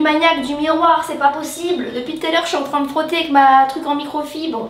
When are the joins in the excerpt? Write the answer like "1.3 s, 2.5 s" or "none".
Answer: none